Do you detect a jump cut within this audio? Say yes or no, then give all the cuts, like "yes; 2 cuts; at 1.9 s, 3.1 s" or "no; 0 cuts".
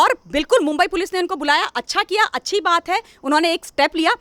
no; 0 cuts